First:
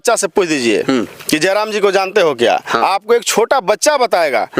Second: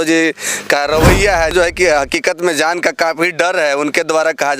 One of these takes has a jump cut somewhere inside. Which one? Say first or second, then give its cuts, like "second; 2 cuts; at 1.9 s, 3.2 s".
second; 1 cut; at 1.5 s